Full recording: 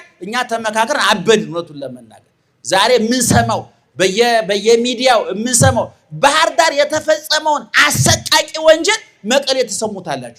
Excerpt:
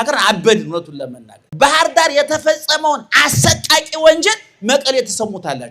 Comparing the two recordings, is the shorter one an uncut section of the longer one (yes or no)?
no